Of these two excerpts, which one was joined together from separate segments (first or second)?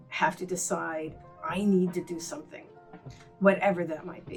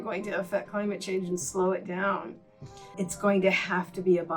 second